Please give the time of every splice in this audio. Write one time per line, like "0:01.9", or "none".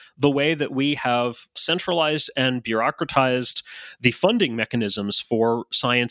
0:01.5

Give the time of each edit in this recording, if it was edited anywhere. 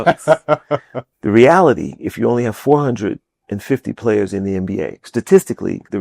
0:01.0

